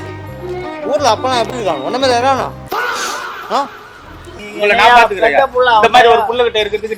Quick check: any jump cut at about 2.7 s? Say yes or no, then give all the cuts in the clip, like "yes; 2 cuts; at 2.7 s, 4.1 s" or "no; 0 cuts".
no; 1 cut; at 4.4 s